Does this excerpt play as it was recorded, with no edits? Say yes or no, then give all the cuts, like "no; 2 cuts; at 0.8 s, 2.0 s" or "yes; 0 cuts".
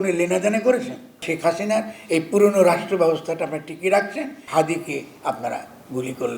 no; 2 cuts; at 1.3 s, 4.4 s